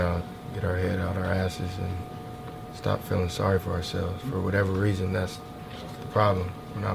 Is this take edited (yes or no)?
no